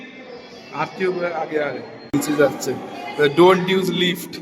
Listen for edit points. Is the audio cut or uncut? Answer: cut